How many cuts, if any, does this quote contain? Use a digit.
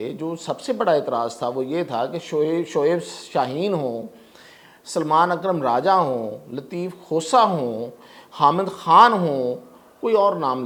0